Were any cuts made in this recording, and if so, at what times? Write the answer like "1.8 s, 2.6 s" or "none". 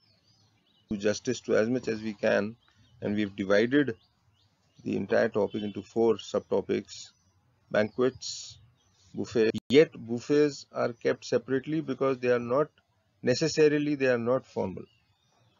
0.9 s, 9.5 s